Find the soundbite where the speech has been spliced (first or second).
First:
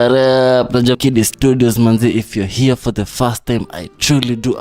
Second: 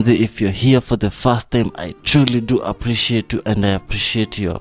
first